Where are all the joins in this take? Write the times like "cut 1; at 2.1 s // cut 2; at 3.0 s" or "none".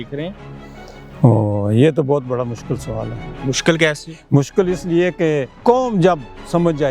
cut 1; at 5.5 s